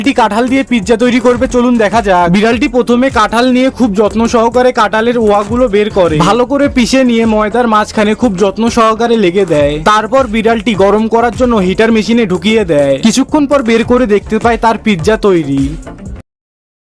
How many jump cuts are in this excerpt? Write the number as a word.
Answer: zero